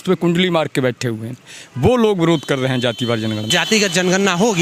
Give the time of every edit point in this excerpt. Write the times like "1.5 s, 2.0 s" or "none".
1.5 s, 3.5 s

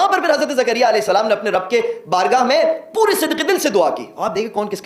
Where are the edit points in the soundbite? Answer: none

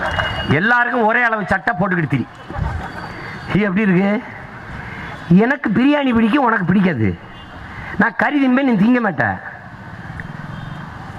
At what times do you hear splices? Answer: none

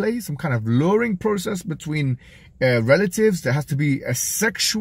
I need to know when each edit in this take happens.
none

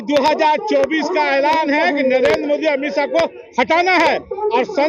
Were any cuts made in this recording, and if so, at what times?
none

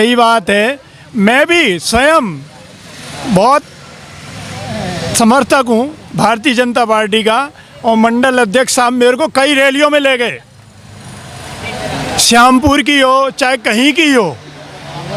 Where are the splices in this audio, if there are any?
none

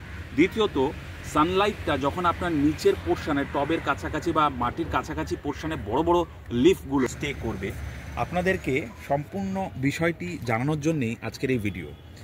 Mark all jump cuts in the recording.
7.1 s

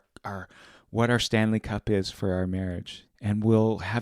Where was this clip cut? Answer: 2.8 s

